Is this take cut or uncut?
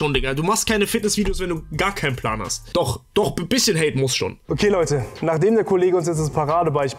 uncut